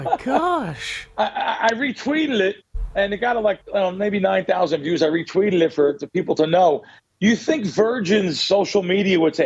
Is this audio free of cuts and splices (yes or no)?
yes